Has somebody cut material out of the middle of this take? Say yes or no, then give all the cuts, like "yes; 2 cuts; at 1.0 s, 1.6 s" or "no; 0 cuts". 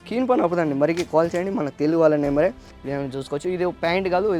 yes; 1 cut; at 2.7 s